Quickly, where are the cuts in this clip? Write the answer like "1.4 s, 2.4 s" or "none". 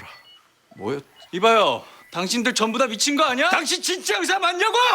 3.6 s